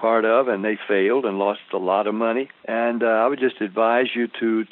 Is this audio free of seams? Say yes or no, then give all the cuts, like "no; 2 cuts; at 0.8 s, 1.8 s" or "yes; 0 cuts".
no; 1 cut; at 2.6 s